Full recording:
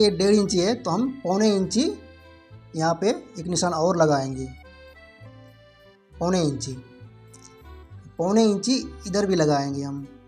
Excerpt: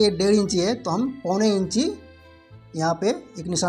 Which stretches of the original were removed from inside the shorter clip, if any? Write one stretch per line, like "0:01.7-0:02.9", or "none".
none